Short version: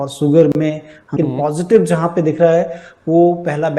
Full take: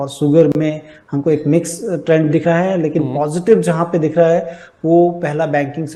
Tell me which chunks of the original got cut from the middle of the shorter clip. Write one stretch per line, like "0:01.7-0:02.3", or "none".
0:01.1-0:02.9